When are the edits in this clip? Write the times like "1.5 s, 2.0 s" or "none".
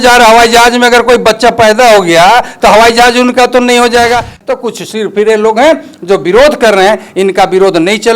4.4 s